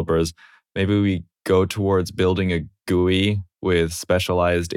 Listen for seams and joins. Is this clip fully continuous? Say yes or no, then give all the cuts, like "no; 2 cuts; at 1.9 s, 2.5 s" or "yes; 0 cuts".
no; 1 cut; at 1.3 s